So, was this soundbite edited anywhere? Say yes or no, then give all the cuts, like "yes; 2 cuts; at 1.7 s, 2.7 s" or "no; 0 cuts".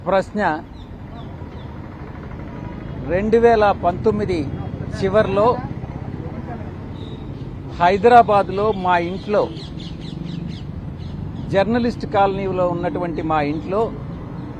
no; 0 cuts